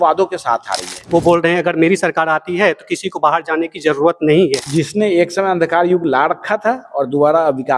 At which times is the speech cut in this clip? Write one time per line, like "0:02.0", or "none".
0:01.0
0:04.6